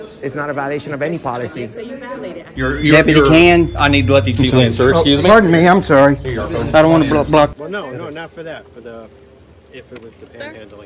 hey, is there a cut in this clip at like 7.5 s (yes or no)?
yes